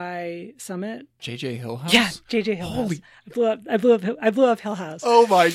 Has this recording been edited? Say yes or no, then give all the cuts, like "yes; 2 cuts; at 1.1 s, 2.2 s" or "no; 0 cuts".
yes; 1 cut; at 1.2 s